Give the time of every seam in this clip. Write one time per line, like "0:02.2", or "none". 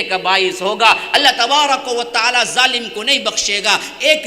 none

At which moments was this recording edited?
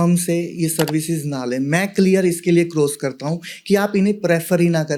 none

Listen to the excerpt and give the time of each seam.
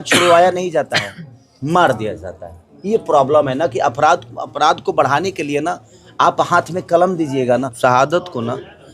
0:07.7

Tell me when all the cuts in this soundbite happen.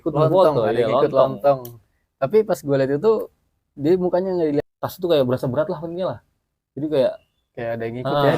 0:04.6

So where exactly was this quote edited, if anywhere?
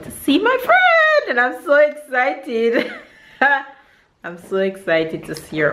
none

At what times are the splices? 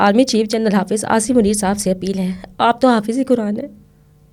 none

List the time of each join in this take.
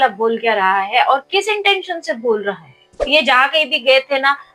0:03.1

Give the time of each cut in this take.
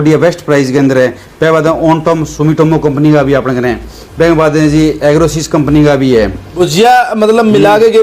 0:06.5

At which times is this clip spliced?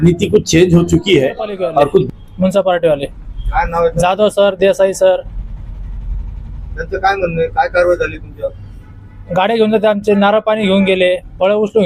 0:02.1

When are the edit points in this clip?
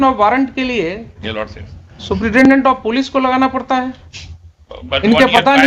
none

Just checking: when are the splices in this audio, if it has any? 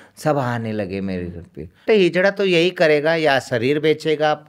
0:01.8

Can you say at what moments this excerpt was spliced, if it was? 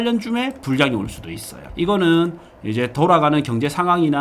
none

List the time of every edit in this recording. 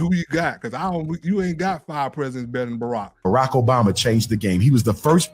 0:03.1

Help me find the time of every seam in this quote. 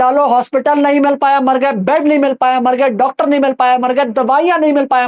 none

